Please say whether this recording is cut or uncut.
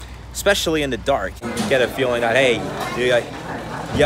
cut